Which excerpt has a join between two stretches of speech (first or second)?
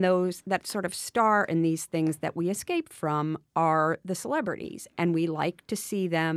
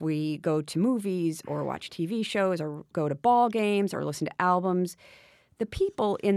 second